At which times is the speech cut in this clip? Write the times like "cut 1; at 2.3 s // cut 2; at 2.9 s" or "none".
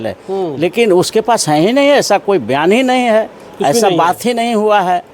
none